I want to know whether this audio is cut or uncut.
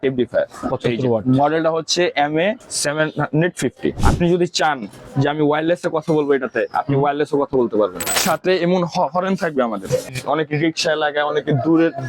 cut